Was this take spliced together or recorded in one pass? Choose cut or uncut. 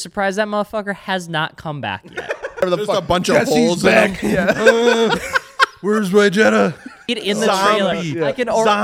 cut